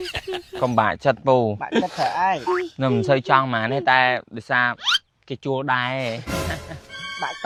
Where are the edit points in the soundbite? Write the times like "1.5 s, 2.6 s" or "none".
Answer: none